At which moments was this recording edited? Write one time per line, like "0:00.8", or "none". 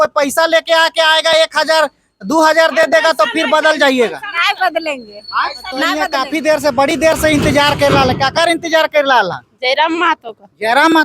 0:06.0